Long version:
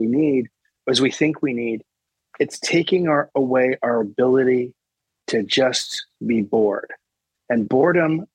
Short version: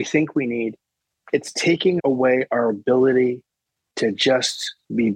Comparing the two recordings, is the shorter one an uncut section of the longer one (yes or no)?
no